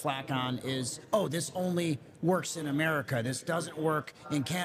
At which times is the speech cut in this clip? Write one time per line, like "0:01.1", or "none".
none